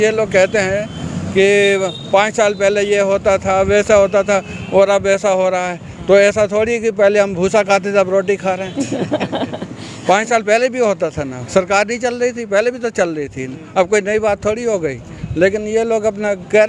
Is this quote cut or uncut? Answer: uncut